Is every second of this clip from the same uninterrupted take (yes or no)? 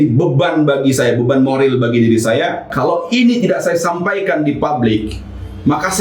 no